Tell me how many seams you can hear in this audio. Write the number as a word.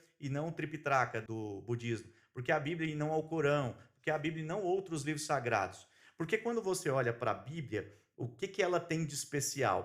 one